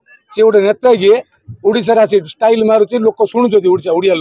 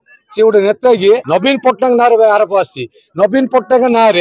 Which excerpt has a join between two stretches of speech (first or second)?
second